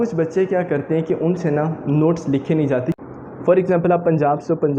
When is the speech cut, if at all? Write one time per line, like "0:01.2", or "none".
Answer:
0:03.0